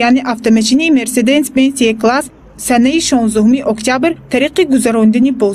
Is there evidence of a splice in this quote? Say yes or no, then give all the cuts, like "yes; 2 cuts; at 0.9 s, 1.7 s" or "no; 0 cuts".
yes; 1 cut; at 4.2 s